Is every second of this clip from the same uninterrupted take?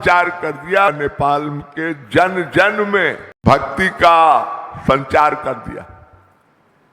no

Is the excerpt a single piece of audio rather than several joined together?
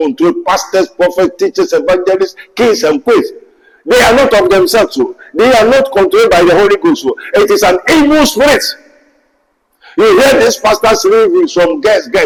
yes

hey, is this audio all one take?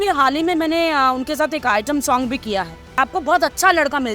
no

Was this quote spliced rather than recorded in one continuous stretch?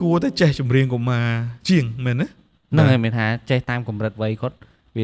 no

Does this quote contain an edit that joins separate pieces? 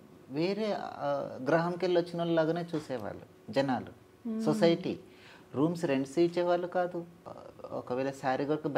yes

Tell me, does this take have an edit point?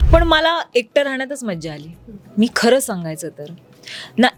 no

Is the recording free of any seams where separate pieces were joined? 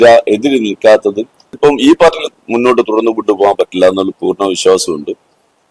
no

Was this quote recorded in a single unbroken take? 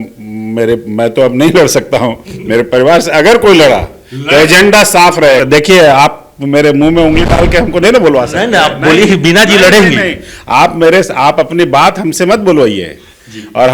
no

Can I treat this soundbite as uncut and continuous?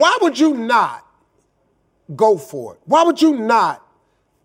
yes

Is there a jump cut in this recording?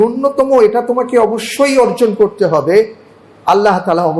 no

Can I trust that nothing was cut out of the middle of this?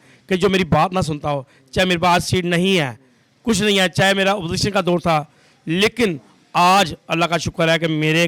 yes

